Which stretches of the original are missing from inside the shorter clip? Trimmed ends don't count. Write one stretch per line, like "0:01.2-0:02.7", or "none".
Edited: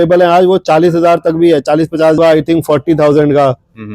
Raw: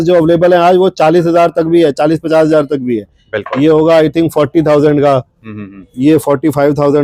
0:02.5-0:03.8

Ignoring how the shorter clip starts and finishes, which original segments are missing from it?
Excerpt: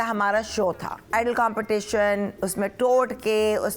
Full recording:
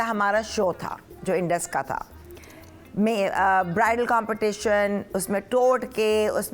0:01.1-0:03.9

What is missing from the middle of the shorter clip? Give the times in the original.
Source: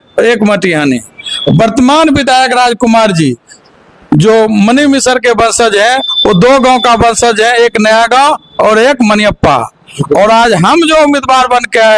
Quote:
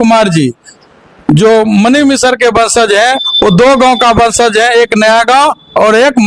none

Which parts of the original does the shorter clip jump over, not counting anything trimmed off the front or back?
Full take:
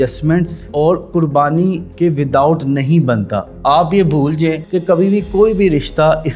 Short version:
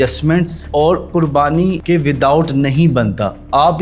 0:01.8-0:01.9

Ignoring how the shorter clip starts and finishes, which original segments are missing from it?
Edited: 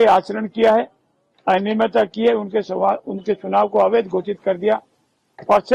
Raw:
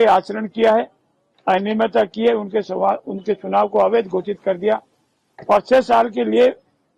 none

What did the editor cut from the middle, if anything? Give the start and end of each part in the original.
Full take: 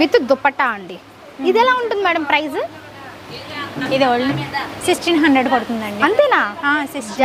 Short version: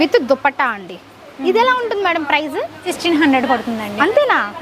0:02.8-0:04.9

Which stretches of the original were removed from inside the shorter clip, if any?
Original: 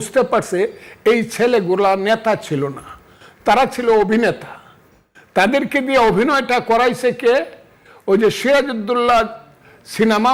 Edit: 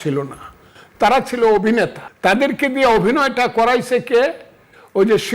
0:04.5-0:05.2

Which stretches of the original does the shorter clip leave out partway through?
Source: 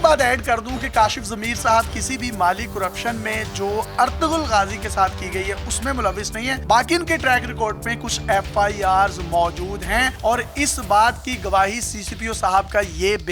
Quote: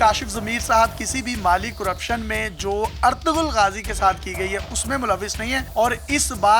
0:06.6-0:10.1

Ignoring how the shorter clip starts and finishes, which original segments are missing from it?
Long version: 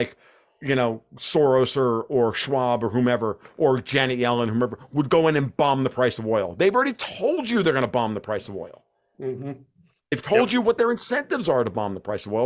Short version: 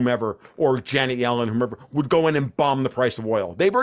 none

